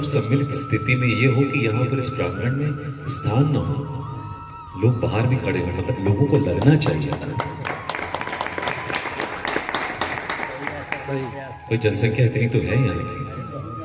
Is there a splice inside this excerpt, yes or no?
no